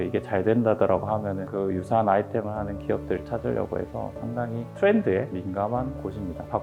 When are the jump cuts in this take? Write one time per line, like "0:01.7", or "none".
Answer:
none